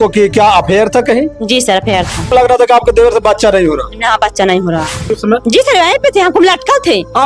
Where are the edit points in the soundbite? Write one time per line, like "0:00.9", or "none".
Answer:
0:02.3
0:05.1